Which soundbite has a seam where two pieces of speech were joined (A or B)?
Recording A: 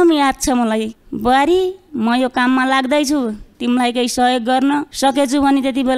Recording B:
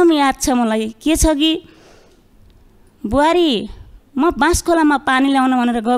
A